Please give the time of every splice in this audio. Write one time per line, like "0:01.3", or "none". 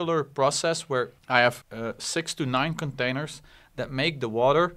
0:01.2
0:01.7